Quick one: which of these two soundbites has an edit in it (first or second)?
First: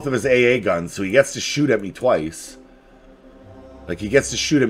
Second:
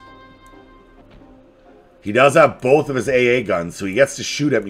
second